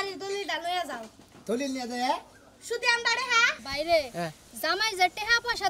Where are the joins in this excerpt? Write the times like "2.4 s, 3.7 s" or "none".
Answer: 3.6 s